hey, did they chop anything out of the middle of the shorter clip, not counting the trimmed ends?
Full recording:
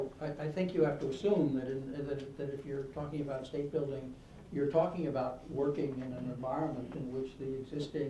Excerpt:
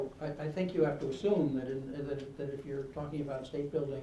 no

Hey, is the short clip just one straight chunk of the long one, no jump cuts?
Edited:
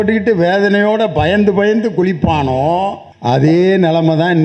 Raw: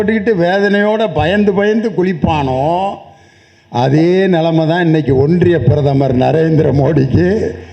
no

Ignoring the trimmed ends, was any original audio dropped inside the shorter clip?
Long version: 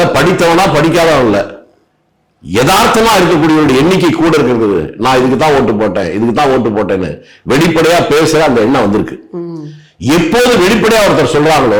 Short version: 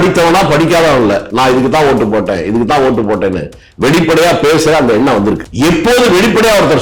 yes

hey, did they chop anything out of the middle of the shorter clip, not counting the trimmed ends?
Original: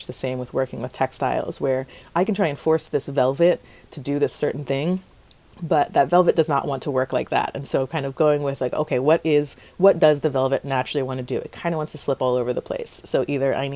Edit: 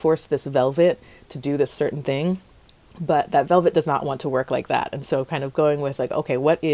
no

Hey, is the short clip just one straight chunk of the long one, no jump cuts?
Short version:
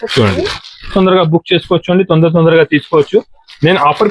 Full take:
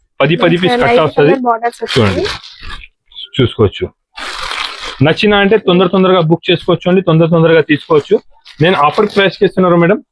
no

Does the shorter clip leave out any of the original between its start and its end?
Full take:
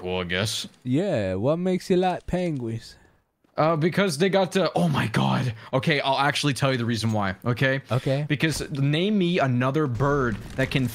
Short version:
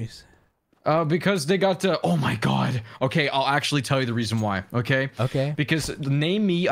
no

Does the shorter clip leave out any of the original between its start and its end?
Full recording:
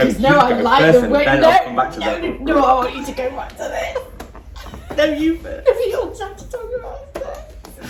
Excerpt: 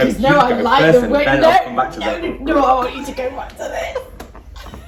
no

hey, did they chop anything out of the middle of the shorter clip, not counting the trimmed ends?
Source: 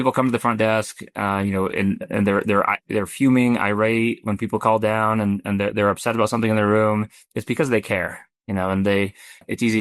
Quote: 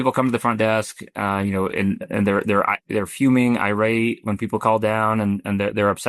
no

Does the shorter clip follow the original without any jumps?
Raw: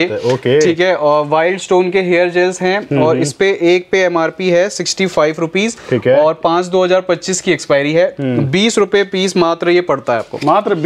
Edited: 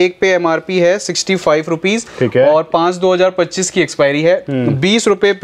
yes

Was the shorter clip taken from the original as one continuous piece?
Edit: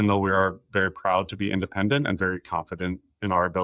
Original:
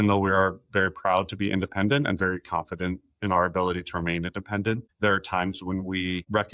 yes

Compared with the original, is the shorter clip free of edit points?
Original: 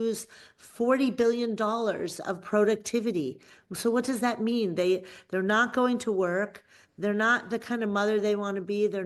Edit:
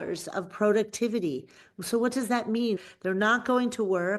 no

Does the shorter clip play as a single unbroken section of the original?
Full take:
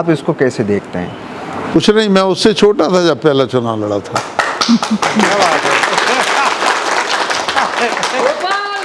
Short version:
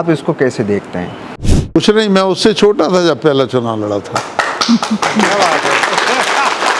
yes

